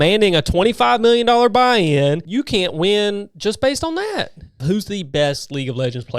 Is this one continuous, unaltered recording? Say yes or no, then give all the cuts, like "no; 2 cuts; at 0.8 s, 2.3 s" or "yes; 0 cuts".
no; 2 cuts; at 2.2 s, 4.6 s